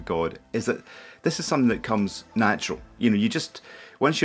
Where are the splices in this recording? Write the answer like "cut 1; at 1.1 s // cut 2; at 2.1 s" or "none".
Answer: none